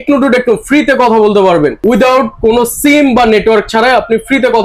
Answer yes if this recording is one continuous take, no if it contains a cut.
yes